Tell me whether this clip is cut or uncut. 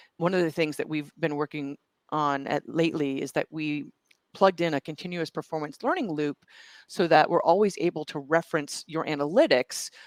uncut